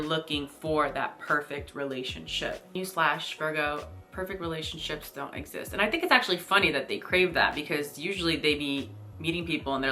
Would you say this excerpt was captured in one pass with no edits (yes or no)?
no